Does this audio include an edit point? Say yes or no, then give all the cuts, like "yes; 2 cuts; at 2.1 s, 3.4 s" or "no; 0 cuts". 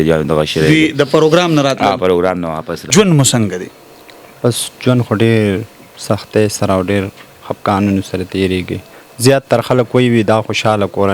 yes; 1 cut; at 2.7 s